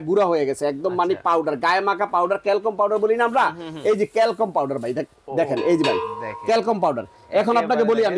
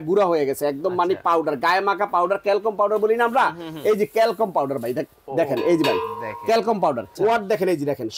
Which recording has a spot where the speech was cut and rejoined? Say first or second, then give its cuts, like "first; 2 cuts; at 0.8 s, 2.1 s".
second; 1 cut; at 7.1 s